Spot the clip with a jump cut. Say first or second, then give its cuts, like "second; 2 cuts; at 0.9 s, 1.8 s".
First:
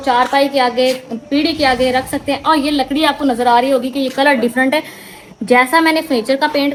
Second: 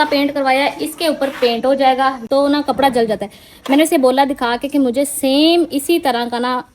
second; 1 cut; at 2.2 s